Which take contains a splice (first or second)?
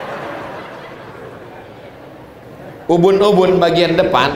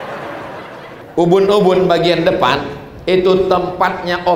second